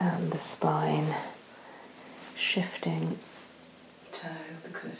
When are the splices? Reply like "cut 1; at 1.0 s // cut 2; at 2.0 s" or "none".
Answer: cut 1; at 4.1 s